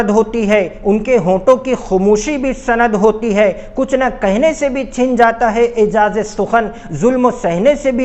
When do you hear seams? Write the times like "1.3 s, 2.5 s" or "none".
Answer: none